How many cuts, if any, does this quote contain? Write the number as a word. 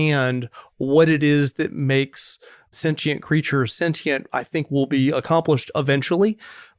zero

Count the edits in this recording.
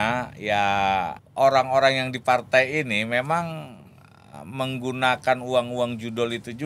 one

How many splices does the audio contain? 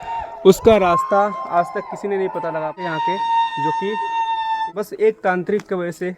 two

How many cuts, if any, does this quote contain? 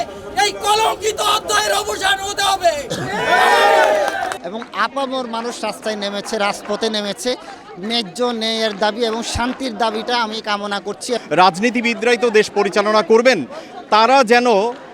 two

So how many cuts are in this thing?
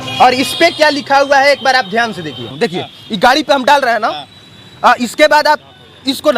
one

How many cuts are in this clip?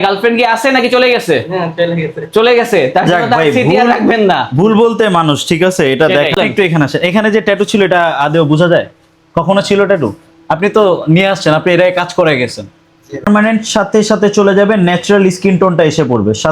two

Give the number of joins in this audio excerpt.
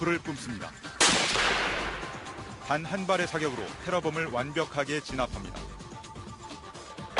one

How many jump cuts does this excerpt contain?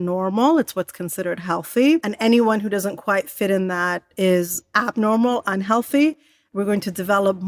two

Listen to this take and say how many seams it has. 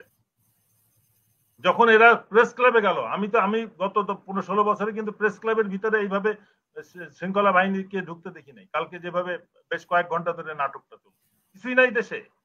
one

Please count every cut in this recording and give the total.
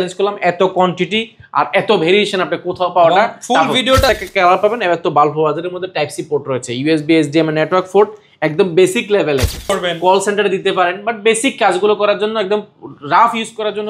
two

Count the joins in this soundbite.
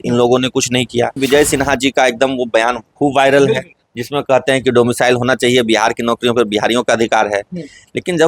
one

